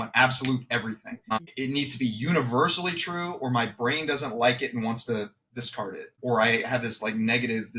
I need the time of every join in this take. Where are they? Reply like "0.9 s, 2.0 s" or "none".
1.2 s, 6.2 s